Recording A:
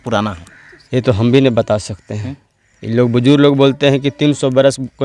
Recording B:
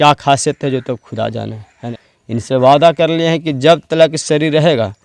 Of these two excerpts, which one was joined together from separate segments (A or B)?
B